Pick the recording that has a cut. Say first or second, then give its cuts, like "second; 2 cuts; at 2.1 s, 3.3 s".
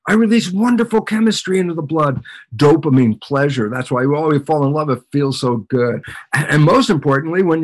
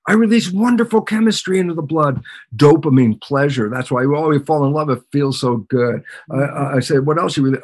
first; 1 cut; at 6.1 s